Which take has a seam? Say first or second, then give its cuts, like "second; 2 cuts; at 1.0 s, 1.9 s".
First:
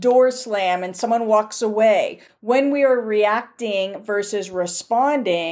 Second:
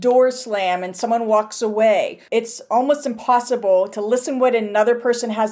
second; 1 cut; at 2.2 s